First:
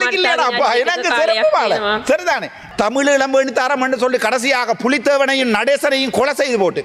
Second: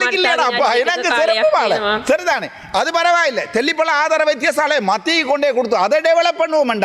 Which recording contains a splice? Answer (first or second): first